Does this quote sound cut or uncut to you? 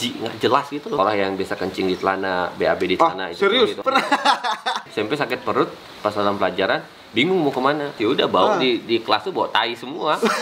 cut